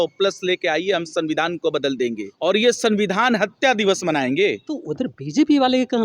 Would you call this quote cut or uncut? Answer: cut